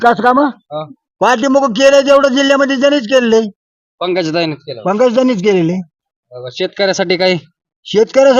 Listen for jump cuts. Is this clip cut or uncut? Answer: uncut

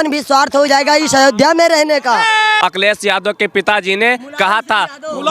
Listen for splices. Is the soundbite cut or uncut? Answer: cut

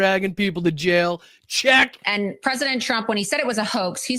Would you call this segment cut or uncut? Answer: cut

